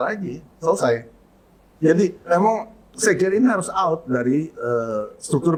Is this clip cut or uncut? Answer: uncut